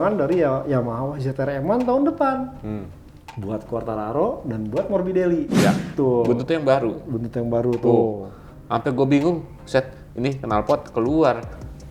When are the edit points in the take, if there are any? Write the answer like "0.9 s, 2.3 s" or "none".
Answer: 5.9 s